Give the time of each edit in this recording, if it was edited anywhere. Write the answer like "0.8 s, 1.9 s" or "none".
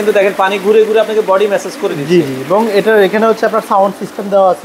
none

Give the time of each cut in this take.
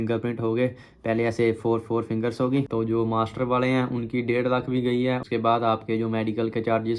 2.7 s, 5.2 s

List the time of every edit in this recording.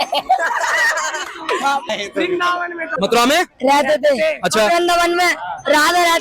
1.9 s, 2.9 s

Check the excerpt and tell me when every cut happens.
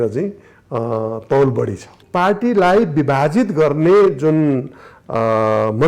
2.0 s

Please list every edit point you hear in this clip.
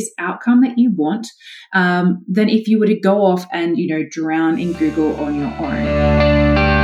5.9 s

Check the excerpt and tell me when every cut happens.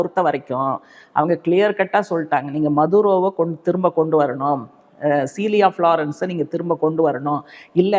none

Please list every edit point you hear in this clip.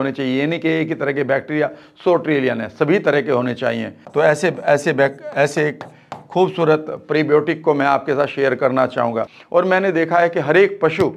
4.0 s, 9.3 s

